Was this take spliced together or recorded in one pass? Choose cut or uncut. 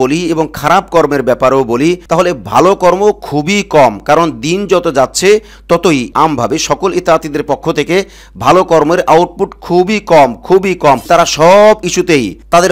cut